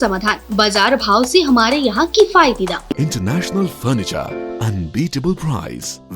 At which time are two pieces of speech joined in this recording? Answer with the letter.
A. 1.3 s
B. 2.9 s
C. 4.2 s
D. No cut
B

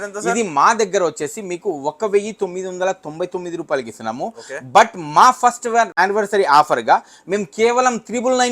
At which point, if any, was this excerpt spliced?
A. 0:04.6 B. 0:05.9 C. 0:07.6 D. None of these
B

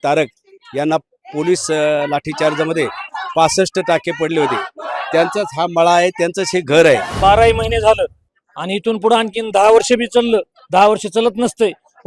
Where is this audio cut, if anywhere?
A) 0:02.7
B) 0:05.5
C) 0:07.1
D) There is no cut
C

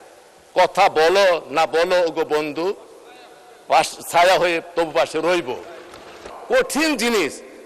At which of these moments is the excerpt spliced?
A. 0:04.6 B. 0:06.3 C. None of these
B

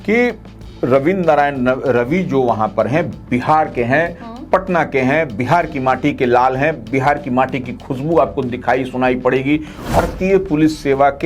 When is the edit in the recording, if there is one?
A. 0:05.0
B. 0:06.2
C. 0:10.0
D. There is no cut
C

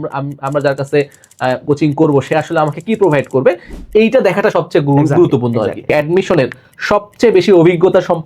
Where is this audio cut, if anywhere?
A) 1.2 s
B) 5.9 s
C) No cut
B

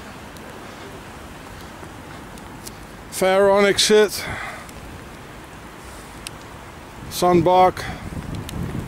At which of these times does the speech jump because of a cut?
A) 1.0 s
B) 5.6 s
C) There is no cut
A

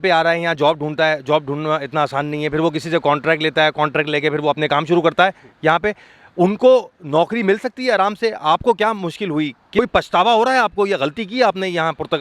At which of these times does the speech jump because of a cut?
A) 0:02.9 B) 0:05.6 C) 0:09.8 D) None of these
C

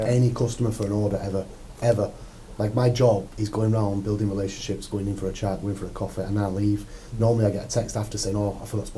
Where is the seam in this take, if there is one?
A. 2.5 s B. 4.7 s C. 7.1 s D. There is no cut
D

